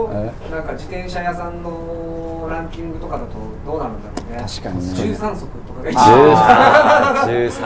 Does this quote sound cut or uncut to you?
uncut